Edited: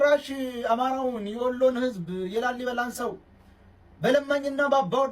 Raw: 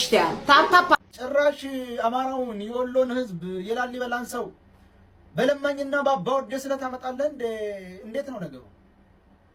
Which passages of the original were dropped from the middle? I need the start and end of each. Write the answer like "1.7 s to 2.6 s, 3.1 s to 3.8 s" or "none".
none